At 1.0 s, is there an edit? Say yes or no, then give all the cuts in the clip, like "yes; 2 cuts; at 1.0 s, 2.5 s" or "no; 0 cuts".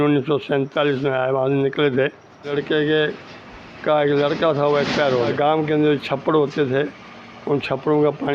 no; 2 cuts; at 2.5 s, 5.3 s